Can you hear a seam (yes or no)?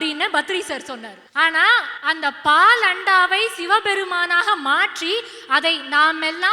yes